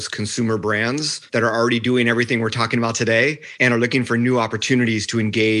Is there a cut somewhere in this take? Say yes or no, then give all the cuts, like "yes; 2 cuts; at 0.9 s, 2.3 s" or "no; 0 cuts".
yes; 2 cuts; at 1.2 s, 3.5 s